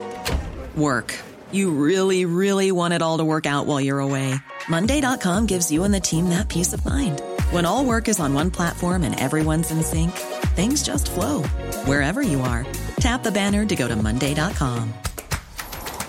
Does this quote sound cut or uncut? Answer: uncut